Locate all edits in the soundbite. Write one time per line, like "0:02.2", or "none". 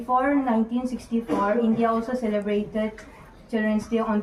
none